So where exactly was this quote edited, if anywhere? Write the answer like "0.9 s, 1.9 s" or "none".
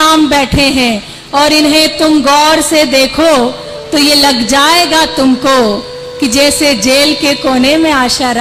none